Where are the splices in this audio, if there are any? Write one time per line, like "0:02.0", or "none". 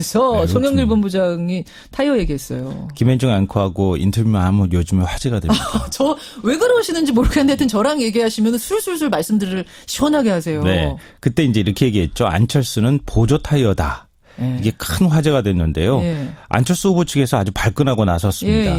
none

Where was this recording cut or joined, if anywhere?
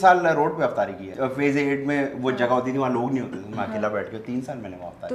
0:01.0

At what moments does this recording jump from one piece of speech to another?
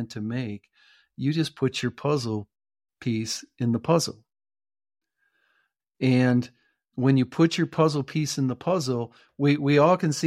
0:06.9

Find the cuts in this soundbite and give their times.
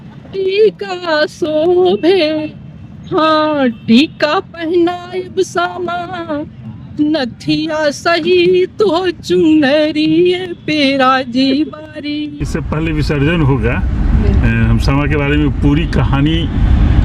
0:12.4

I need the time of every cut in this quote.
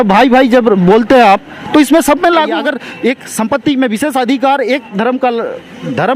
0:02.5

